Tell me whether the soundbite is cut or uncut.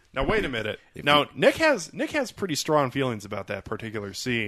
uncut